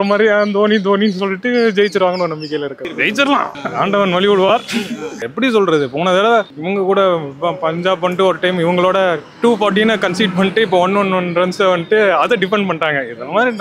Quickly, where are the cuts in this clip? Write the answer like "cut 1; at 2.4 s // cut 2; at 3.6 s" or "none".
none

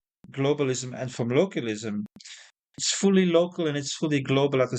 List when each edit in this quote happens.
cut 1; at 2.8 s

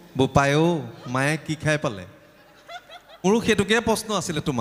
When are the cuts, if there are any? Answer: cut 1; at 3.2 s

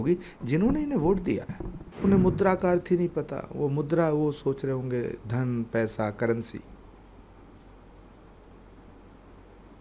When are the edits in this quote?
cut 1; at 2.0 s

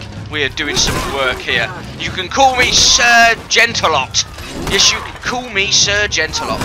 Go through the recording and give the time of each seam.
none

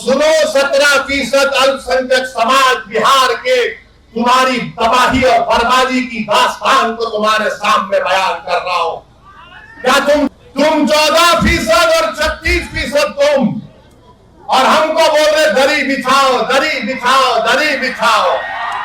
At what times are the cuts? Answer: cut 1; at 10.3 s

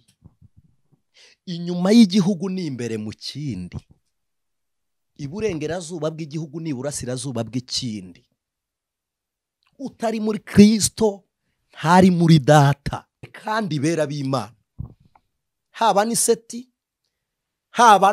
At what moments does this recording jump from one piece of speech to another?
cut 1; at 13.3 s

